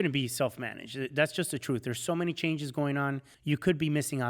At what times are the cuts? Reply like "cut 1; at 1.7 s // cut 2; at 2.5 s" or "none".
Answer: cut 1; at 3.3 s

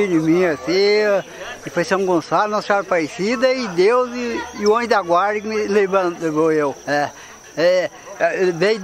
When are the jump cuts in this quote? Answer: cut 1; at 6.8 s

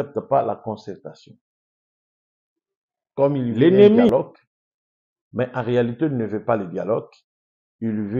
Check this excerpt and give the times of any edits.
cut 1; at 4.1 s

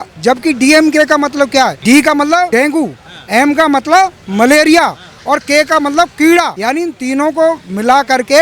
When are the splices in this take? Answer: cut 1; at 1.8 s // cut 2; at 2.5 s // cut 3; at 6.5 s

